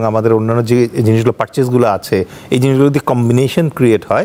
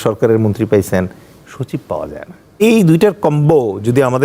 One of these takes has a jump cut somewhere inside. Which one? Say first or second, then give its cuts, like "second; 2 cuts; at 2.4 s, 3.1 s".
second; 1 cut; at 2.5 s